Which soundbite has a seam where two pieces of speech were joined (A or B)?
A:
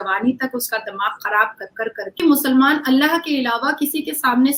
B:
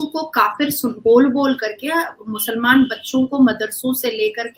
A